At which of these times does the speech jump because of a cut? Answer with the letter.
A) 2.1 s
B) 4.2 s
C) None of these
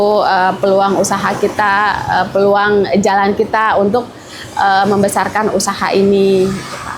C